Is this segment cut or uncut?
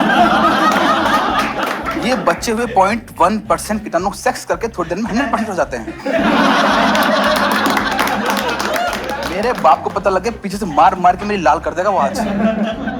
cut